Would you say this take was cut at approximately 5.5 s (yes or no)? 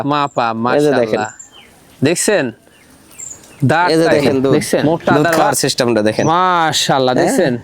yes